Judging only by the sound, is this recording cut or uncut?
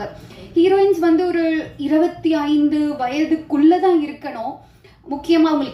uncut